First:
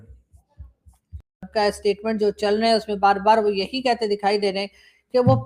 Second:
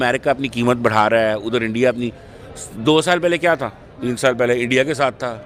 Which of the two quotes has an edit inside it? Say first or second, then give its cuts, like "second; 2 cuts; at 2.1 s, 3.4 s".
first; 1 cut; at 1.2 s